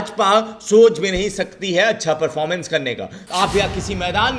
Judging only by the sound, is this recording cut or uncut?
cut